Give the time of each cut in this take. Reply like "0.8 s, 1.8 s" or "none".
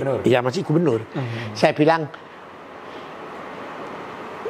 none